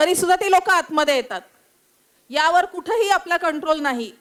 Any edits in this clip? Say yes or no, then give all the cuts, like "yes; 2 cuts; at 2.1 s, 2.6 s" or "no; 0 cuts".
no; 0 cuts